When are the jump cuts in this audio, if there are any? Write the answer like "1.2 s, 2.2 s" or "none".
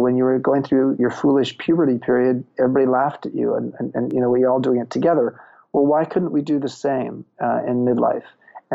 1.0 s